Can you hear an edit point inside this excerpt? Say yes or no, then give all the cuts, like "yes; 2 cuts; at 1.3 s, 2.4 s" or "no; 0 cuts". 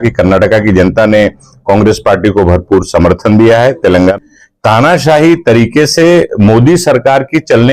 yes; 1 cut; at 4.2 s